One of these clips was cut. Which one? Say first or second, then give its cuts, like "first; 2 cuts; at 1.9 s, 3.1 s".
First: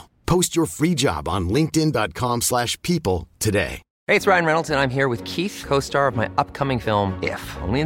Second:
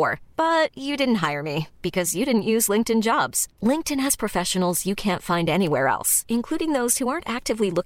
first; 1 cut; at 3.9 s